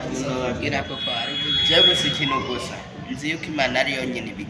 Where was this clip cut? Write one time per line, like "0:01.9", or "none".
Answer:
0:01.3